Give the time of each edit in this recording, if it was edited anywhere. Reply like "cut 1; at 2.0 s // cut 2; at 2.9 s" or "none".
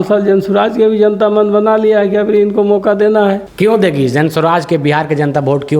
cut 1; at 3.5 s